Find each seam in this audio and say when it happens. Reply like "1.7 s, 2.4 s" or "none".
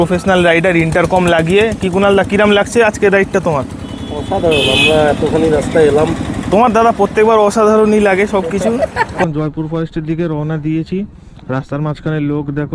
9.2 s